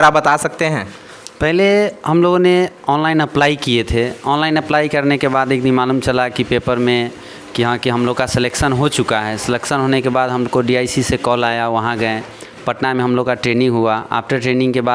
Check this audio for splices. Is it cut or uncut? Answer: uncut